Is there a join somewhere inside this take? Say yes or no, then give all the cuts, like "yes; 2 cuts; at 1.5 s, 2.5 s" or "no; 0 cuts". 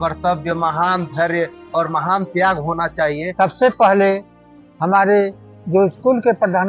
yes; 1 cut; at 3.2 s